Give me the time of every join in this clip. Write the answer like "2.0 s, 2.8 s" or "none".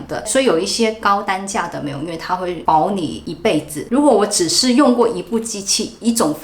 3.8 s